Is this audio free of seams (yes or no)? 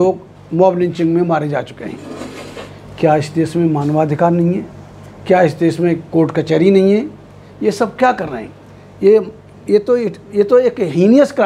yes